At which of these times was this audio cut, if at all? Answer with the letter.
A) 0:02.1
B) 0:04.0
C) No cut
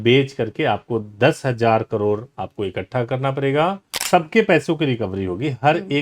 B